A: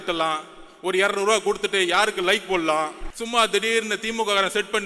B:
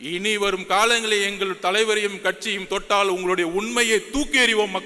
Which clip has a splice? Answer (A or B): A